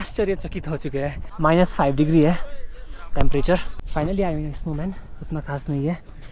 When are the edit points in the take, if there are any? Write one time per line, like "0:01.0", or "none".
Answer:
0:01.2
0:03.8